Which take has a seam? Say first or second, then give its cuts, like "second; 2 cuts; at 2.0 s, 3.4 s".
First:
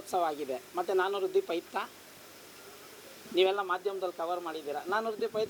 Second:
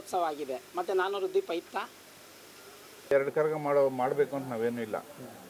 second; 1 cut; at 3.1 s